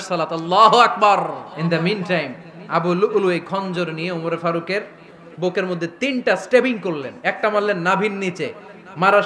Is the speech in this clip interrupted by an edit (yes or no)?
yes